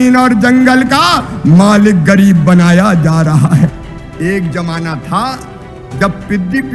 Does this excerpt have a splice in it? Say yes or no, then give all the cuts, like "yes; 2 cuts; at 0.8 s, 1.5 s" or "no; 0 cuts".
yes; 1 cut; at 3.8 s